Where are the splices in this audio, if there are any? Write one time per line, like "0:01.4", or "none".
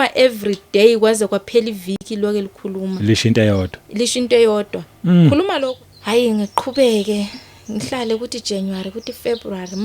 0:05.6